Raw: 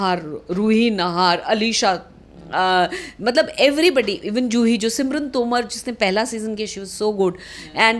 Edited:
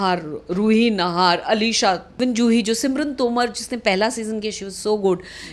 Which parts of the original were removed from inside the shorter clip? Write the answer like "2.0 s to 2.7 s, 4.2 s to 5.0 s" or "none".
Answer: 2.1 s to 4.2 s

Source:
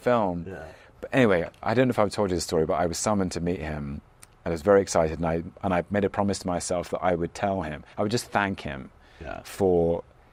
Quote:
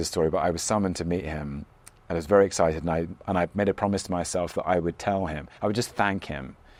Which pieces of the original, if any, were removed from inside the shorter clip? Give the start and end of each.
none

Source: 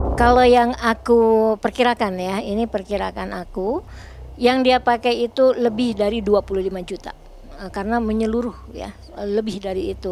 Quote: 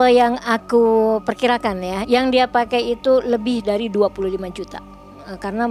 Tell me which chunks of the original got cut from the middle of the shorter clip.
2.4 s to 4.3 s

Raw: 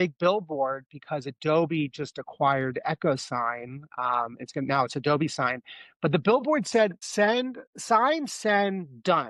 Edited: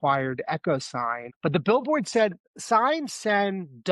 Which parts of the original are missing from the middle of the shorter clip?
3.6 s to 5.8 s, 7.0 s to 7.6 s

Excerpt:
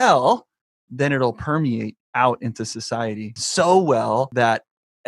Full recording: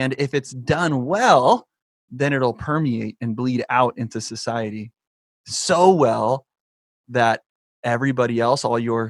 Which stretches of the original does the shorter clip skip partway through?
3.3 s to 3.6 s, 4.9 s to 5.5 s, 6.4 s to 7.1 s

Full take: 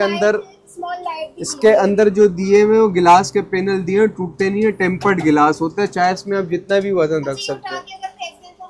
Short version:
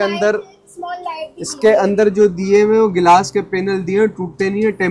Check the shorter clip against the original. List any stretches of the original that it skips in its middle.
none

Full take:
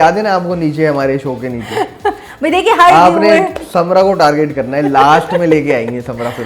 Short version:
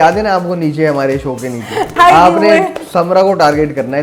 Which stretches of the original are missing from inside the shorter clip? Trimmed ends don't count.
2.0 s to 2.8 s

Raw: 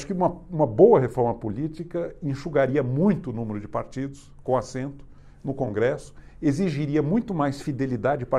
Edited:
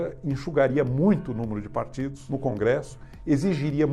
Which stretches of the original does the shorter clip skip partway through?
4.2 s to 5.4 s

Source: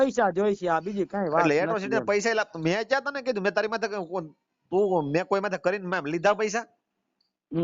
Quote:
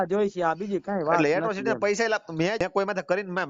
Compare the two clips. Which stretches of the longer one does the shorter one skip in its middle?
2.9 s to 5.2 s

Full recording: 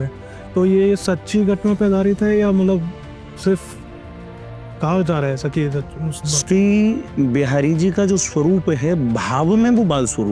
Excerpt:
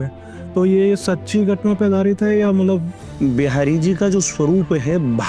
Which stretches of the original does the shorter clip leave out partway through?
3.1 s to 7.1 s

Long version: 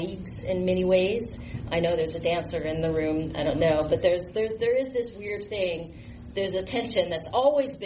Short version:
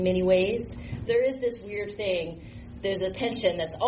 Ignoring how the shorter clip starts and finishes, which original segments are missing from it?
1.6 s to 4.5 s

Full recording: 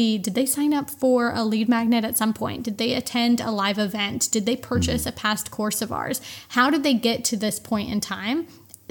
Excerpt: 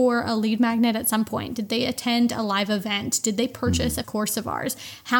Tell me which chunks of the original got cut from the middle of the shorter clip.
5.1 s to 5.5 s

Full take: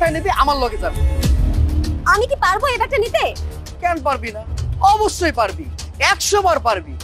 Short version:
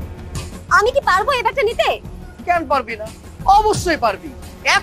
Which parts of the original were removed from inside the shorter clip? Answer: none

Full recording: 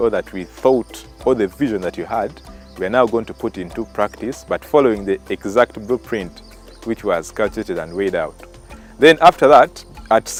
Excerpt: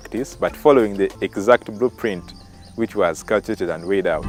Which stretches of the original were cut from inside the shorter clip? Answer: none

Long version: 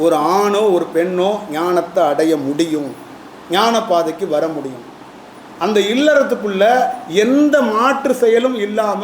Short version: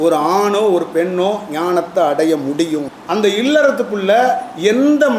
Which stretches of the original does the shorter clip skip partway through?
2.9 s to 5.5 s

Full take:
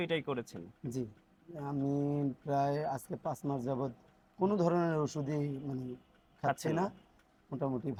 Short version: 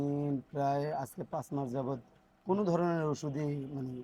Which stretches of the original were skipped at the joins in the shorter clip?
none

